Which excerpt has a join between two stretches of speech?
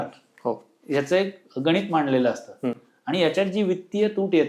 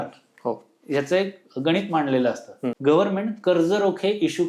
second; 1 cut; at 2.7 s

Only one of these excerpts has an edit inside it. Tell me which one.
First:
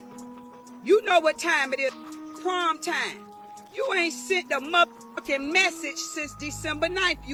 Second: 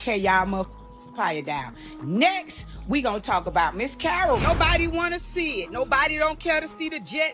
second; 1 cut; at 4.4 s

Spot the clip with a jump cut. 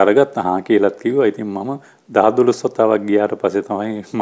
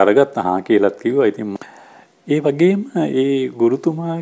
second; 1 cut; at 1.6 s

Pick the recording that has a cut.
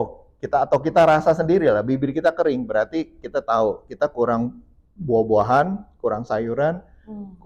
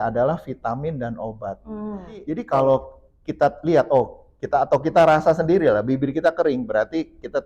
second; 1 cut; at 2.4 s

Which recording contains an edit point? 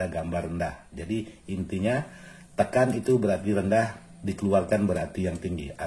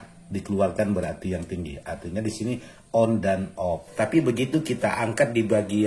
second; 1 cut; at 3.9 s

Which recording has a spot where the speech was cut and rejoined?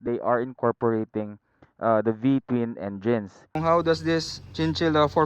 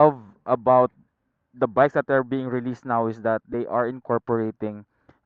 first; 1 cut; at 3.6 s

